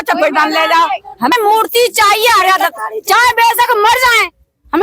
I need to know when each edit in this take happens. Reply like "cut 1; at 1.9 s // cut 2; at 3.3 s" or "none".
cut 1; at 1.3 s